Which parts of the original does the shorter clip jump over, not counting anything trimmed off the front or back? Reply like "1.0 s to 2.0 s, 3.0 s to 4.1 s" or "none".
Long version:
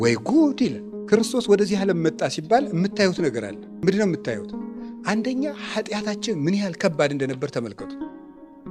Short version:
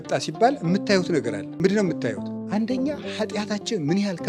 3.5 s to 3.6 s, 4.5 s to 4.9 s